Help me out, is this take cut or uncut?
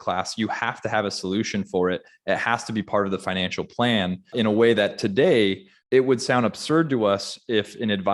cut